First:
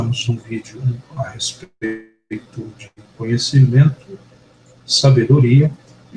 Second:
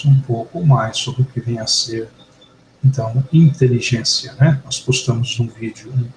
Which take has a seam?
second; 1 cut; at 1.8 s

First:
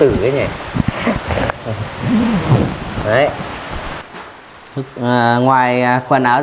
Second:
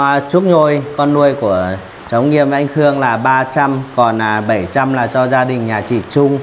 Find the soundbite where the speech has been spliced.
first; 1 cut; at 4.4 s

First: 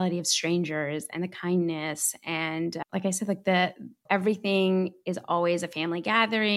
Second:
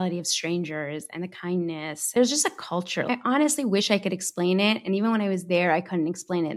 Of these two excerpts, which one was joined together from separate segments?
second; 2 cuts; at 2.1 s, 3.1 s

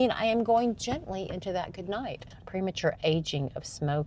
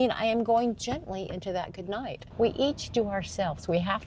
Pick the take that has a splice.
second; 1 cut; at 2.2 s

